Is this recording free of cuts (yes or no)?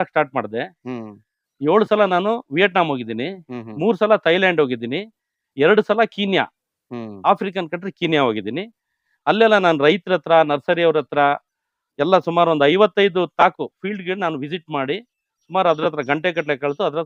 yes